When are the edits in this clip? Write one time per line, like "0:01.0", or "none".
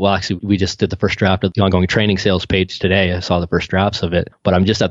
0:01.5